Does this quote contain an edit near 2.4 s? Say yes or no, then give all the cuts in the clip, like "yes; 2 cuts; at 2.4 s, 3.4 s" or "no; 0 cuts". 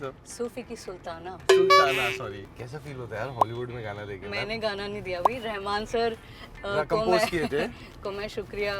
yes; 2 cuts; at 1.5 s, 2.4 s